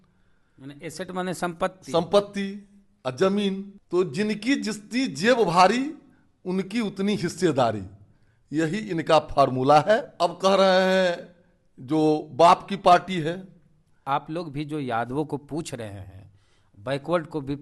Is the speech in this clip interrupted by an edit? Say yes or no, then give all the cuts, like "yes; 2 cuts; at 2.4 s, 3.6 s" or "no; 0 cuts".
yes; 3 cuts; at 3.7 s, 10.1 s, 14.0 s